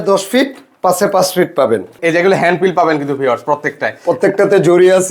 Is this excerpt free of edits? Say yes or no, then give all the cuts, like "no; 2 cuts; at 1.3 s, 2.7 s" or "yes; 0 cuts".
no; 1 cut; at 2.0 s